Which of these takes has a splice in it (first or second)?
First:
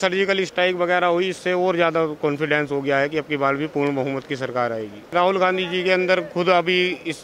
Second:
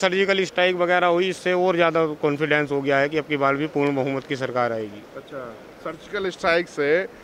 first